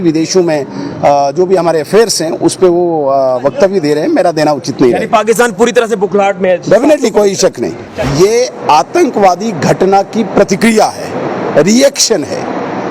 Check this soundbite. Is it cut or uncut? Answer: cut